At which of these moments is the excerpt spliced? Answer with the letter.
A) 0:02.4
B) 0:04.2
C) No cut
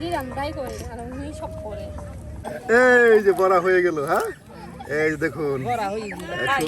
A